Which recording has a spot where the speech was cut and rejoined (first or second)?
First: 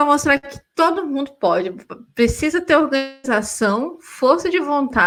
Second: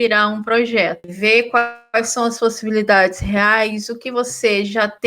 second